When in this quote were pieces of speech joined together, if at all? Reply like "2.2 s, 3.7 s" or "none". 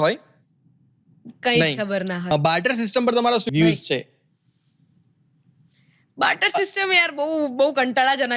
2.3 s, 3.5 s